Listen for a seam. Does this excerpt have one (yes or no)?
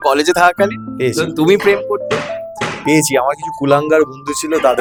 no